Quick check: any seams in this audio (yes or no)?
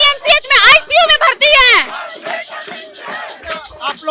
no